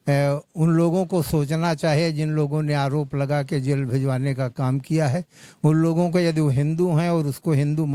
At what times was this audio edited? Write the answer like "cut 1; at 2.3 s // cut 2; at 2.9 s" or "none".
none